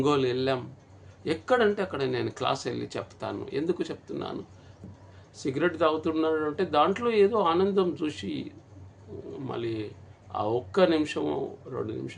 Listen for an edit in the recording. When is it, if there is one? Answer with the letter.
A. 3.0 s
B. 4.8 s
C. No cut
B